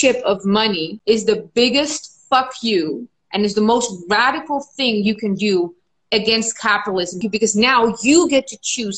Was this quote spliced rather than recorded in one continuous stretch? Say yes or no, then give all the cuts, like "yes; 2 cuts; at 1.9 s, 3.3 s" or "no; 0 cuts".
yes; 2 cuts; at 0.9 s, 7.2 s